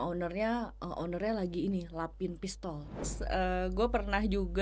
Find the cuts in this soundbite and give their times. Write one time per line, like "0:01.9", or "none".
0:03.2

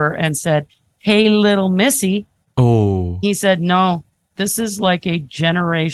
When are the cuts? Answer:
0:03.2
0:04.3

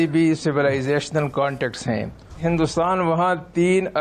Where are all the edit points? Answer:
0:02.4

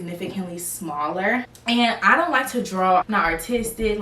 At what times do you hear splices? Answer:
0:01.5

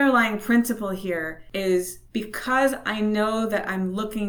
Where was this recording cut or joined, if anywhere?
0:01.4
0:02.0

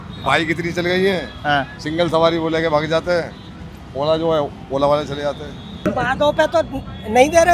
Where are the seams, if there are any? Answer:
0:05.9

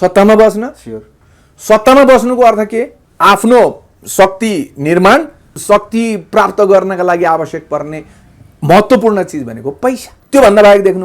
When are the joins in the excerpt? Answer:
0:03.0
0:05.5
0:10.1

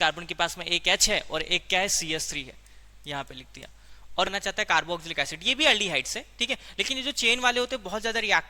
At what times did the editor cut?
0:04.3

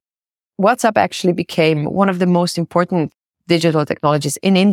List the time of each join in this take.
0:03.2

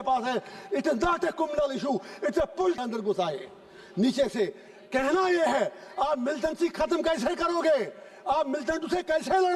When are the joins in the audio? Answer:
0:02.8

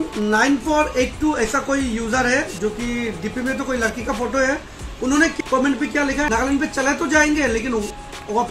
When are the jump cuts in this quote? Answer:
0:05.4

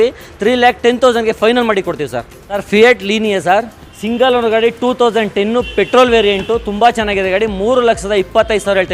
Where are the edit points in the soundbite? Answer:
0:02.6

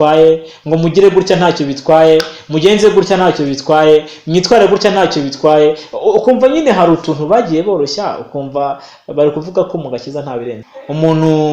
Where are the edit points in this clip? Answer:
0:10.5

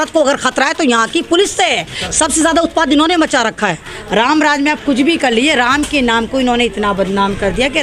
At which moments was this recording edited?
0:03.9

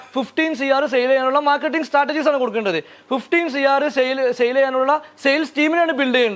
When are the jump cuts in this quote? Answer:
none

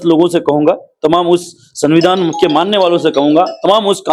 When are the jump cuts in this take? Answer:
none

